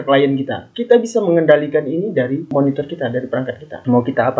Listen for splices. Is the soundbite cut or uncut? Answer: uncut